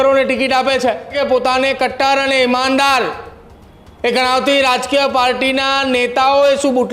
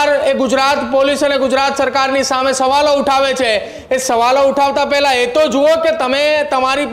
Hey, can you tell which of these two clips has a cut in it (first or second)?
first